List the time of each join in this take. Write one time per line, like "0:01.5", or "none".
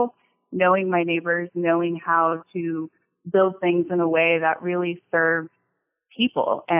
none